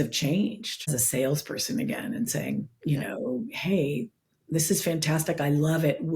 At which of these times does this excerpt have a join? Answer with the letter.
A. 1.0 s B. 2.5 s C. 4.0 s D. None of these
A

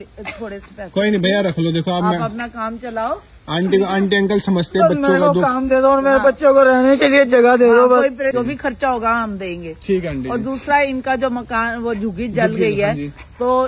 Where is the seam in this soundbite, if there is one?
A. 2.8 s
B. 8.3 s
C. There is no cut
B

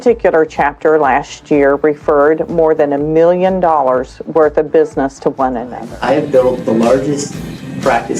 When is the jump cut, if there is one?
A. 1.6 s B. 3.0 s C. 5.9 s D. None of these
C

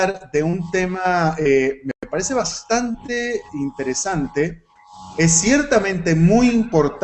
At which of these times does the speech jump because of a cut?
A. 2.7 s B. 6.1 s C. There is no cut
B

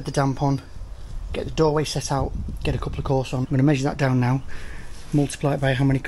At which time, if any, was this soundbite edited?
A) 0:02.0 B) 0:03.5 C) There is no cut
B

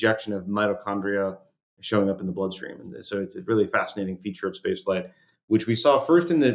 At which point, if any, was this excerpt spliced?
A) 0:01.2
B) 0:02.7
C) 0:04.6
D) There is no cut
D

